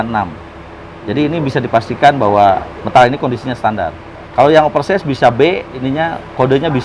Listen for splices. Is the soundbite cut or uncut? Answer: cut